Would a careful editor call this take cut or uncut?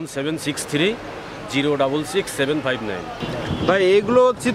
cut